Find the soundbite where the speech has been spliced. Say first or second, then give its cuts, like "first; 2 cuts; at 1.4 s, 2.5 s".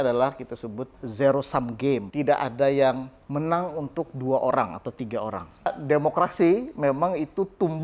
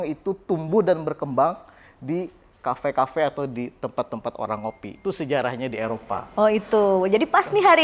first; 3 cuts; at 1.0 s, 2.1 s, 5.7 s